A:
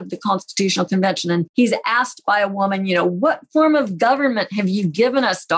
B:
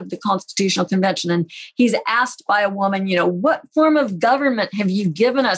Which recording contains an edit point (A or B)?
A